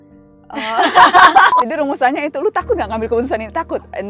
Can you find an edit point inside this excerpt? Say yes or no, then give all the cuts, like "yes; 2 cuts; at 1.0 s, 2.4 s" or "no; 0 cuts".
yes; 1 cut; at 1.6 s